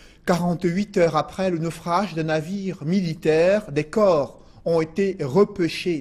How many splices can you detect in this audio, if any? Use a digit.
0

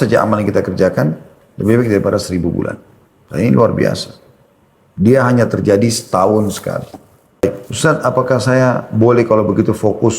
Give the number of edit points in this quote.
1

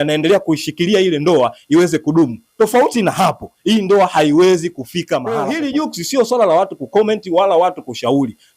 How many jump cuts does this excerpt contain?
1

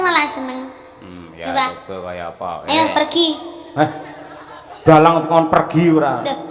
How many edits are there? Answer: 0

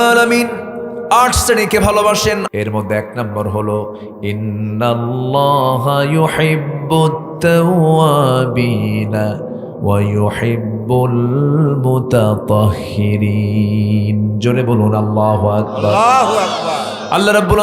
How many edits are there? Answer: 1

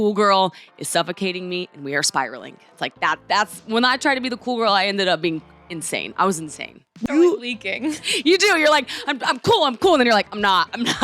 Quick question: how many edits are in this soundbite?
1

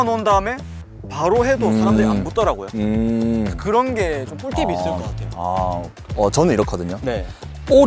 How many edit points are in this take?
0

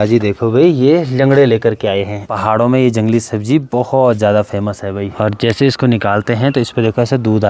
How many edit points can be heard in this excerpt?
2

